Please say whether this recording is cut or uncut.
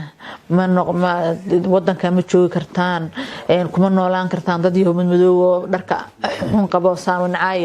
uncut